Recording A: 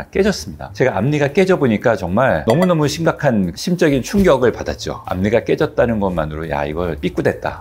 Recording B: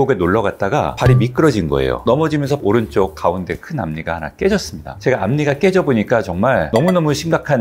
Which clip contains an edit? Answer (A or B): B